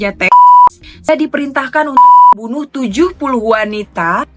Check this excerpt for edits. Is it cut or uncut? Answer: cut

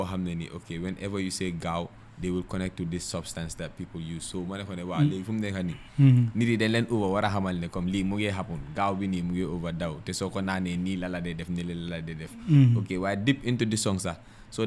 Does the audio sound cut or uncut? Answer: uncut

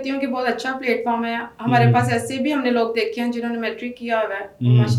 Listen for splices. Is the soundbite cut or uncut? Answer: uncut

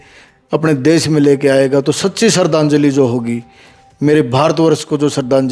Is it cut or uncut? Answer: uncut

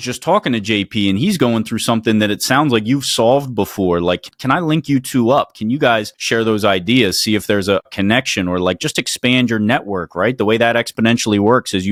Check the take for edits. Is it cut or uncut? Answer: uncut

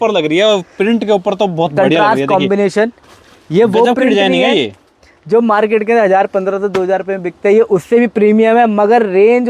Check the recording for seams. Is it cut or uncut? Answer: uncut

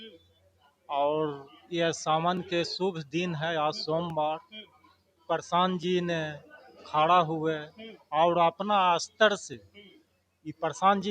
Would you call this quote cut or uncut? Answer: uncut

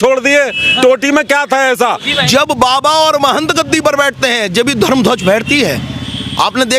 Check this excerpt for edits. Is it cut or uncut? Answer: cut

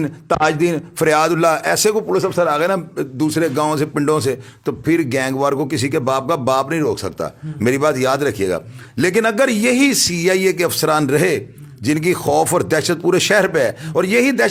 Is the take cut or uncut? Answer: uncut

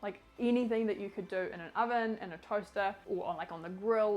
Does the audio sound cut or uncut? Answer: cut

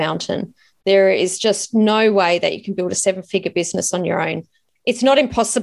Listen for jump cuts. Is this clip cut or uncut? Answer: uncut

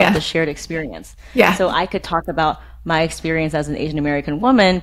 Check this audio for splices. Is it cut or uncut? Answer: uncut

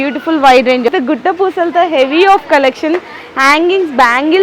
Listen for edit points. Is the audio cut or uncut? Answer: cut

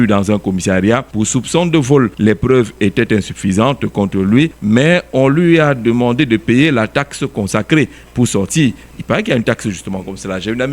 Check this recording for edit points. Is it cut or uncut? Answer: cut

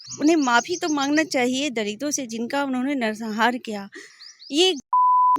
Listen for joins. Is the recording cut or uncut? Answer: cut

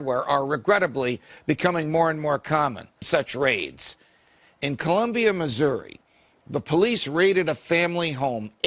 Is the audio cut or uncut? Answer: uncut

